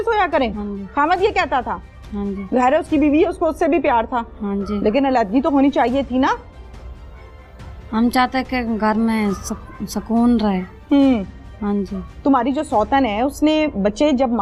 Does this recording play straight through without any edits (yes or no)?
yes